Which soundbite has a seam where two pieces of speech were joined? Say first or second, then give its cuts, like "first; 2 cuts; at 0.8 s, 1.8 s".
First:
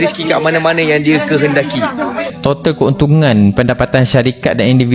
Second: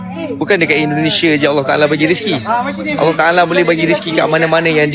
first; 1 cut; at 2.3 s